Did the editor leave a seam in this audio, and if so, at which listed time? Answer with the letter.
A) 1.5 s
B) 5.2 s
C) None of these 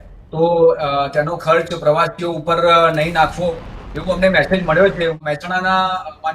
B